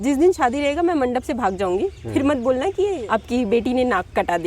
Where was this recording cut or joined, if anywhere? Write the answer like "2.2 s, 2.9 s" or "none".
3.0 s